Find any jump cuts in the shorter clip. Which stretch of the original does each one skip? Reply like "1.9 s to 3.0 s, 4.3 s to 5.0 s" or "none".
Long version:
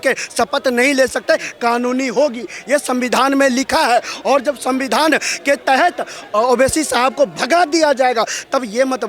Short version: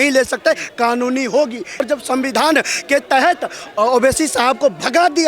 2.7 s to 4.4 s